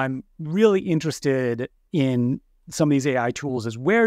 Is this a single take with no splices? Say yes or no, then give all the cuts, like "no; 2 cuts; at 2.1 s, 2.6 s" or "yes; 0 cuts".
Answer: no; 1 cut; at 1.8 s